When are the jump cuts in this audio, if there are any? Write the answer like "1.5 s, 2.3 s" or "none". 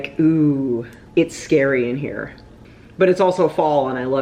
1.0 s